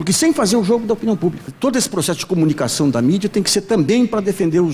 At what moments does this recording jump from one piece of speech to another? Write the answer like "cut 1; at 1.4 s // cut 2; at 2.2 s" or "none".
none